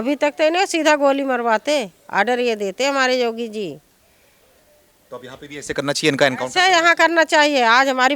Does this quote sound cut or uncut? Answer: uncut